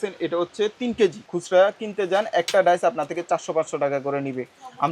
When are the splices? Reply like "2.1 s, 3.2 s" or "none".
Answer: 1.3 s

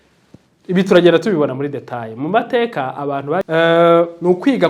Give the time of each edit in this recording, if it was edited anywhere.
3.5 s

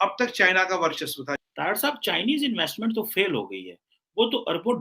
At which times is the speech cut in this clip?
1.3 s

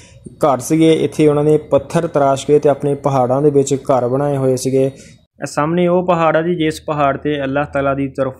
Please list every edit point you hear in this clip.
5.1 s

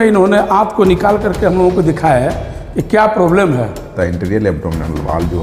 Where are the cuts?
3.9 s

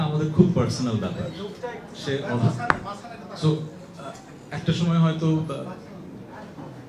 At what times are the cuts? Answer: none

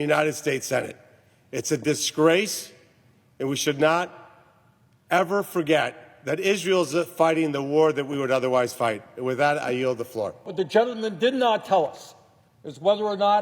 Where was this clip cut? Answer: 10.5 s

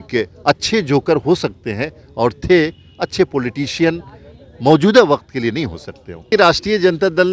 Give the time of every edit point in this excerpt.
6.3 s

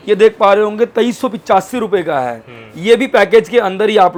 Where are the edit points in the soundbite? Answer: none

